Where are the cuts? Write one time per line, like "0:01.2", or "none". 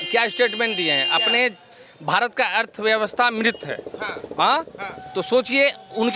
none